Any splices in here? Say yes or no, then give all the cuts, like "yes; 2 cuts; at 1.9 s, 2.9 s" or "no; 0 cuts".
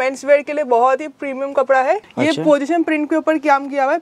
yes; 1 cut; at 2.1 s